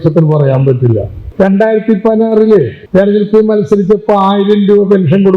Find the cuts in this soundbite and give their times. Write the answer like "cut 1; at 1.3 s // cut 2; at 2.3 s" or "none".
cut 1; at 1.2 s // cut 2; at 2.8 s